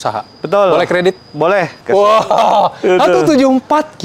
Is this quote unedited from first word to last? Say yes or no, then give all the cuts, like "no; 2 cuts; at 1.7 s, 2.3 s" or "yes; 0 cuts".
no; 1 cut; at 1.8 s